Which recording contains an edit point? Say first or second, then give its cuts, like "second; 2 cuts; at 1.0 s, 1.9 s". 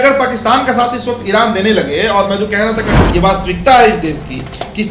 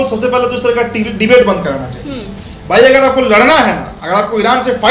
first; 1 cut; at 3.0 s